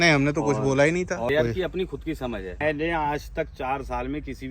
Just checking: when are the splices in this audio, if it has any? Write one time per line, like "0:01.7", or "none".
0:01.3
0:02.6